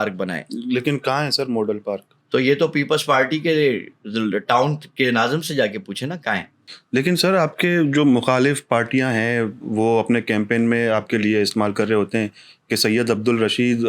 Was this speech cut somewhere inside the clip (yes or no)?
yes